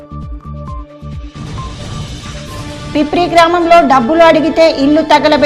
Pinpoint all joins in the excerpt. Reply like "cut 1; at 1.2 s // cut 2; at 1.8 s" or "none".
none